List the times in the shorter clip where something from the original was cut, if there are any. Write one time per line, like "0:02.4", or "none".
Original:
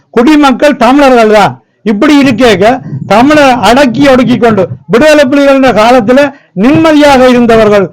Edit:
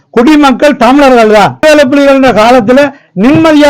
0:01.6

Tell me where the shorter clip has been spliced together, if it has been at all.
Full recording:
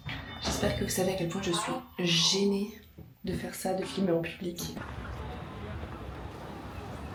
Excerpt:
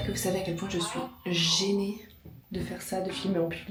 none

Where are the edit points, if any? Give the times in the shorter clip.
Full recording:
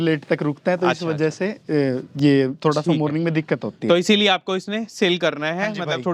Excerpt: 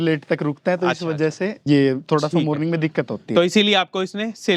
0:01.6

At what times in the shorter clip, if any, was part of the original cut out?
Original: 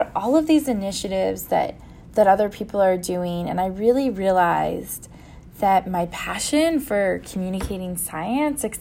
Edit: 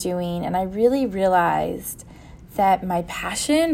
none

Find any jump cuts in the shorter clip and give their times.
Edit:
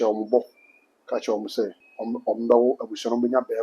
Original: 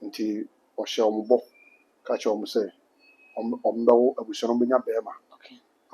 0:01.9

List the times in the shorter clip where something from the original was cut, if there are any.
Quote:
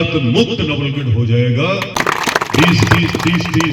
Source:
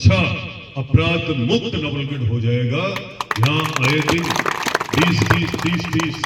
0:02.0

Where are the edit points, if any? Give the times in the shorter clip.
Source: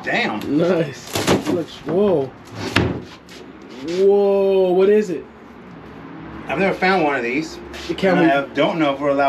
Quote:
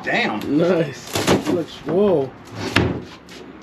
none

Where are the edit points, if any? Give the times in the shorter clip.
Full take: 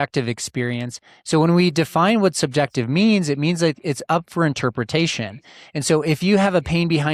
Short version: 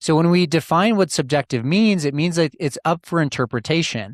none

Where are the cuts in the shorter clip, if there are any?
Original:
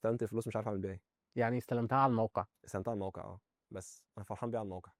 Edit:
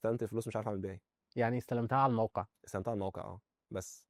none

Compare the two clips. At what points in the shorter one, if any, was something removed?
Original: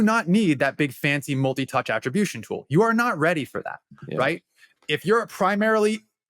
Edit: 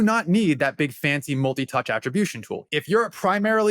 0:02.6

